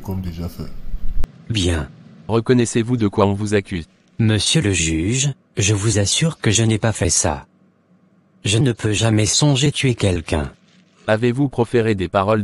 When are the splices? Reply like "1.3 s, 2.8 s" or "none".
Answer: 2.1 s